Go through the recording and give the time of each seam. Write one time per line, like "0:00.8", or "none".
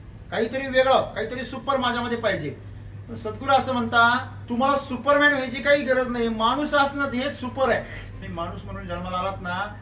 0:04.3
0:08.1